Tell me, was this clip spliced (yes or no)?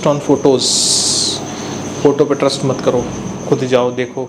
no